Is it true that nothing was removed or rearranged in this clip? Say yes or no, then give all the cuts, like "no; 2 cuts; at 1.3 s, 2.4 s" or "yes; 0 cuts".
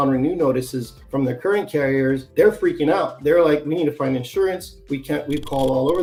yes; 0 cuts